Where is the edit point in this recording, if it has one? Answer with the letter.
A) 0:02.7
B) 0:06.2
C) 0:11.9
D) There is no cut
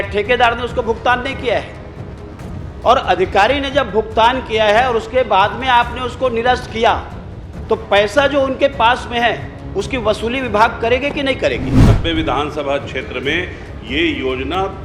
C